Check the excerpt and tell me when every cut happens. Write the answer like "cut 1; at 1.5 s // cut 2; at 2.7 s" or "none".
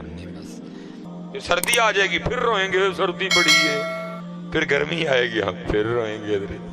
cut 1; at 1.0 s